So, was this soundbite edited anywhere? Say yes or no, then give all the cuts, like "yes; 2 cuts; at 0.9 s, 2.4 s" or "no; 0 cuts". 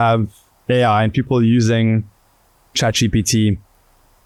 no; 0 cuts